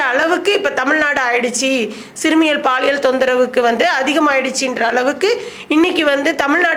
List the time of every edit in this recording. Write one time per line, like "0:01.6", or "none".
none